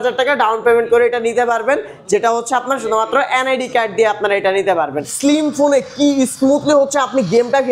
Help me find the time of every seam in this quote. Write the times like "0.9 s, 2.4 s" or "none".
5.0 s